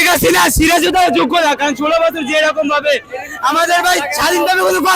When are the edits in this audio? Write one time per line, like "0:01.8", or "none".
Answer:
none